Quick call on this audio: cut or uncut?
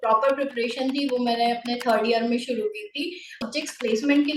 cut